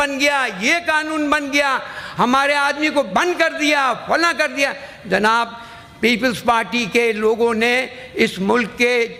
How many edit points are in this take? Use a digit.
0